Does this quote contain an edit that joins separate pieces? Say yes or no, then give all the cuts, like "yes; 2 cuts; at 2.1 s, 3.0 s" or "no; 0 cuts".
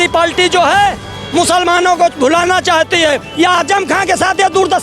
yes; 1 cut; at 3.3 s